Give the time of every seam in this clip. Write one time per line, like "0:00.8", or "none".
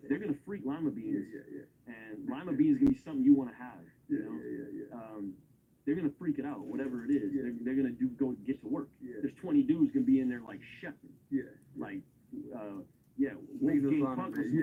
none